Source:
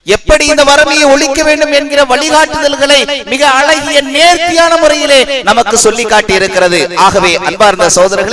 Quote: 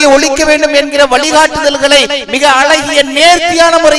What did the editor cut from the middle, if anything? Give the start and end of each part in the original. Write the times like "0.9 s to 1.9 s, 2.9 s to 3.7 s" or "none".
none